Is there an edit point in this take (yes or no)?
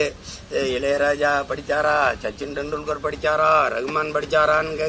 no